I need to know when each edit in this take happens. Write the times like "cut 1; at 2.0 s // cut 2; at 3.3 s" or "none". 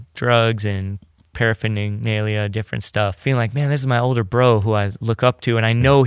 cut 1; at 3.2 s